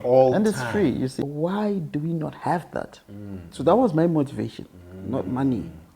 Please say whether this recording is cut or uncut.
cut